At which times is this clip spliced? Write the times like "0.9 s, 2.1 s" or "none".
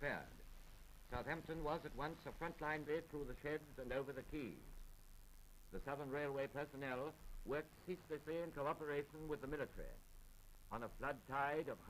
none